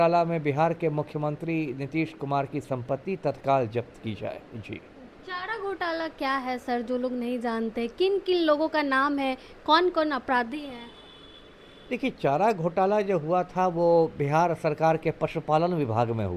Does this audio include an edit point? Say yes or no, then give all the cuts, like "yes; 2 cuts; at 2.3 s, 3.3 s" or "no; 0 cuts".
no; 0 cuts